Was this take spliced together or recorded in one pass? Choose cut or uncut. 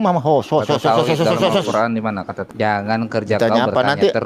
cut